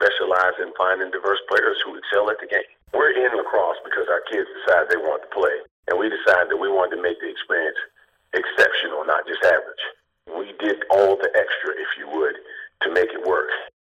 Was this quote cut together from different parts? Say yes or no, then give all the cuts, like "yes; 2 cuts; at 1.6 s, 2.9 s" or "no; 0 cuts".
yes; 1 cut; at 2.8 s